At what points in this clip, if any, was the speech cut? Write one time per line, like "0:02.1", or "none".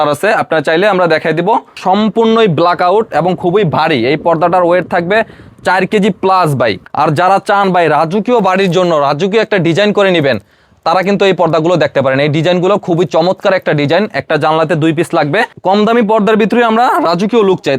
0:01.8
0:06.8
0:15.5